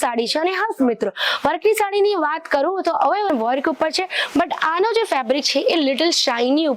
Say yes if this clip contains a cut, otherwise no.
yes